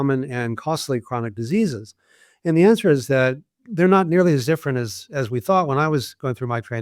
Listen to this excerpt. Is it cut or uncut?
uncut